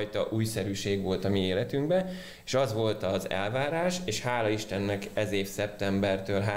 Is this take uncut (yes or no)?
yes